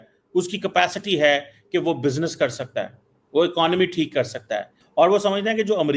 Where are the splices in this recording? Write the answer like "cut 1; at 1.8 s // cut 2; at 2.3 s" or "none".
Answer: cut 1; at 4.8 s